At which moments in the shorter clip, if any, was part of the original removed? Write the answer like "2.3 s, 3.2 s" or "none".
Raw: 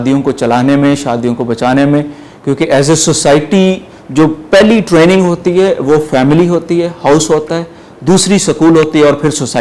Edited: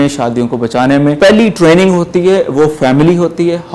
1.2 s